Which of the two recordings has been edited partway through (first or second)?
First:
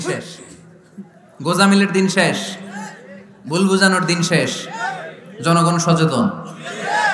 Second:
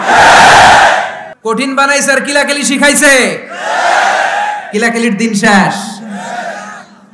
second